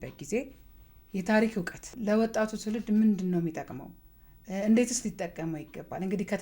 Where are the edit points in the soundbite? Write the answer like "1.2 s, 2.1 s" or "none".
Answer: 1.8 s